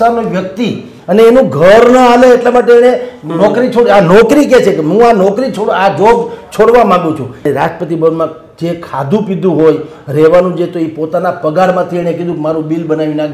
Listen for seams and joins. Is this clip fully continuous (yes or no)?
no